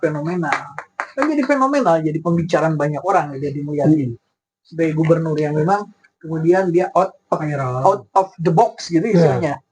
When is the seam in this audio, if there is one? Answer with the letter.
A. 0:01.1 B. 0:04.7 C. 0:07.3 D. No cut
D